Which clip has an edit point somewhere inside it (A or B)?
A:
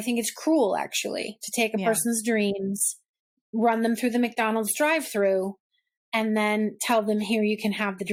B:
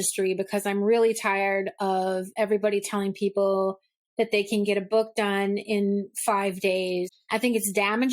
B